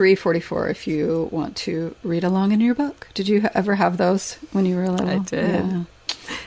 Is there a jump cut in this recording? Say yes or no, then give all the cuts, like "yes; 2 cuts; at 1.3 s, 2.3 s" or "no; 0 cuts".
no; 0 cuts